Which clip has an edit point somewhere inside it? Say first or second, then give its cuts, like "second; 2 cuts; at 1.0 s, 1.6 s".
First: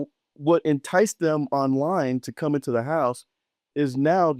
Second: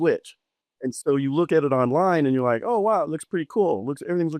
second; 1 cut; at 1.0 s